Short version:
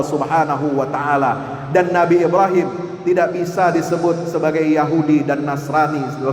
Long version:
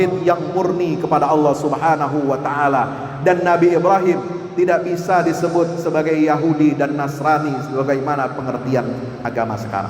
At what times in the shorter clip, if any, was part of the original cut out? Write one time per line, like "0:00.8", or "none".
none